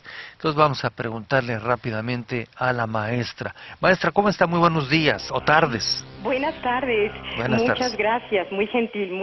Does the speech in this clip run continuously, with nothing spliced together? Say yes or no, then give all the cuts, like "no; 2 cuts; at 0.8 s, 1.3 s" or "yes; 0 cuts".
yes; 0 cuts